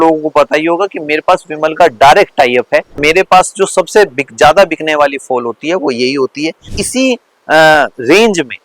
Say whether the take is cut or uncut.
cut